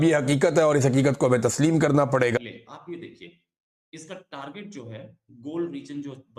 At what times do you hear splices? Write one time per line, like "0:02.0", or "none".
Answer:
0:02.4